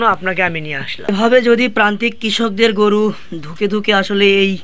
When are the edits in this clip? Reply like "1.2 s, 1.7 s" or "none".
1.1 s